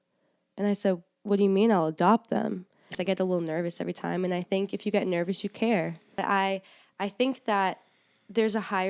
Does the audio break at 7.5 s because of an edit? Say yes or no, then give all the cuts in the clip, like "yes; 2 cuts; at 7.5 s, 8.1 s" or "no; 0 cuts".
no; 2 cuts; at 2.9 s, 6.2 s